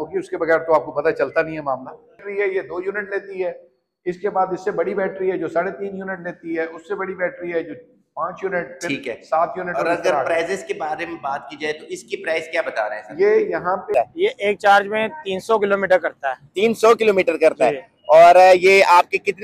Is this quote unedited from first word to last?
no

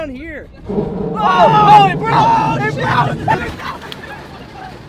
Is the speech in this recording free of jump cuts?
no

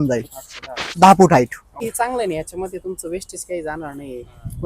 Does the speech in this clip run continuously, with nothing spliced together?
no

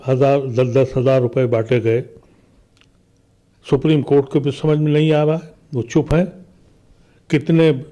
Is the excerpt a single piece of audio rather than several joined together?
yes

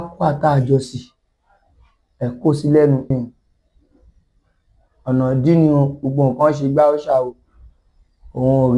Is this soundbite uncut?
no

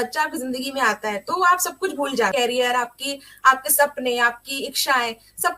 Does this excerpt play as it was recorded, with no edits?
no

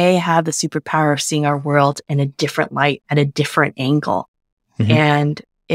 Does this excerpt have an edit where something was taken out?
no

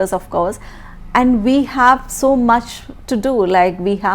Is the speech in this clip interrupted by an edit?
no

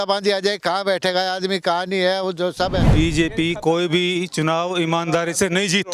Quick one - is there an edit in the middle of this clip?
yes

